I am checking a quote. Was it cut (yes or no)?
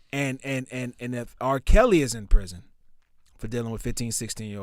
no